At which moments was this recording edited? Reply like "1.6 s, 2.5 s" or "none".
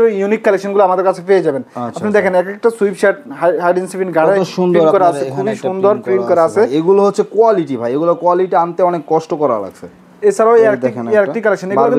none